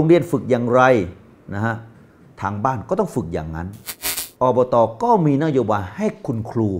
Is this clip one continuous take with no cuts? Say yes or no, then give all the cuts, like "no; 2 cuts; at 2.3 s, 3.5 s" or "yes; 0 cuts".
no; 1 cut; at 4.2 s